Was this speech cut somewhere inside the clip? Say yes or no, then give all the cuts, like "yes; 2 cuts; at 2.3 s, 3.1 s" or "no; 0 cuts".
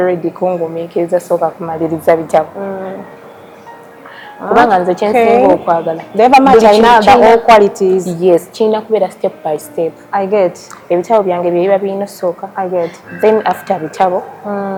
no; 0 cuts